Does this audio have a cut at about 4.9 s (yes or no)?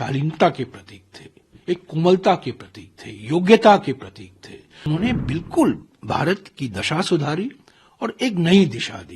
yes